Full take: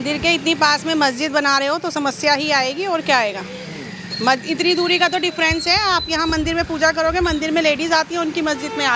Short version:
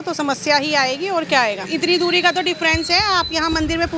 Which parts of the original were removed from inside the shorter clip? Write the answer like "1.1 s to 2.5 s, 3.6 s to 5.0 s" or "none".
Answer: 3.4 s to 4.4 s